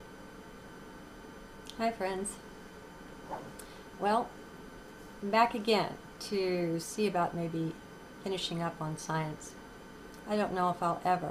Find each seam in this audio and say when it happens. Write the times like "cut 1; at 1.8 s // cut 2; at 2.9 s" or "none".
none